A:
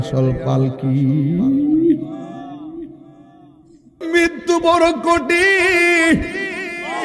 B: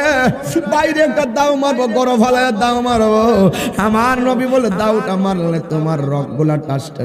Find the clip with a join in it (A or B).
A